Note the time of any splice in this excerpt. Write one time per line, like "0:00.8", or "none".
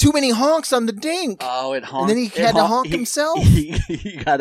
none